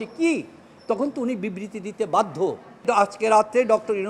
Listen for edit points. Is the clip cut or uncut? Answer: cut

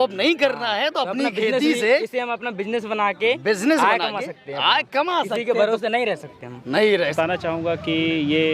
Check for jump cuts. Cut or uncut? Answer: cut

